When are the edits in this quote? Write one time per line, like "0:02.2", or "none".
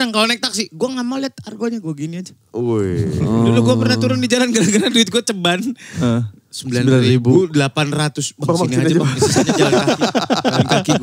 none